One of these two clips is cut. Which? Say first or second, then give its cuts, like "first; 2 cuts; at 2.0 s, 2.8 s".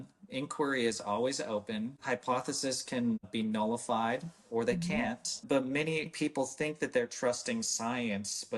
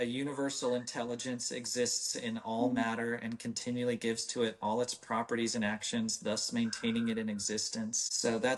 first; 3 cuts; at 3.3 s, 5.3 s, 6.1 s